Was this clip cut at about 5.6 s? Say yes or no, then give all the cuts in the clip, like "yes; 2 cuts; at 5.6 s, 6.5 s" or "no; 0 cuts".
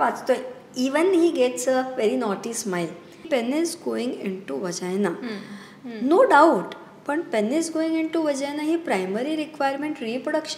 no; 1 cut; at 3.3 s